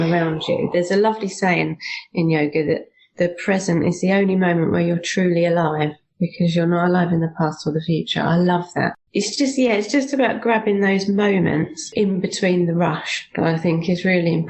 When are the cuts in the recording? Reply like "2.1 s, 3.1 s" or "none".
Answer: 9.0 s, 11.8 s